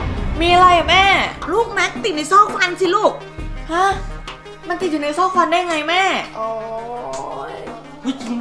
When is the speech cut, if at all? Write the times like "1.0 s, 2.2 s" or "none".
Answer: none